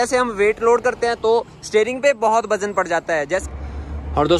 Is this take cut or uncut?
cut